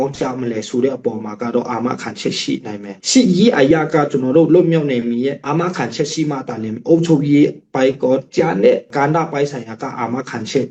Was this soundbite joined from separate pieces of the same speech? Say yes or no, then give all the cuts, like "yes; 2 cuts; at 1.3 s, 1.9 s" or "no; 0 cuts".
no; 0 cuts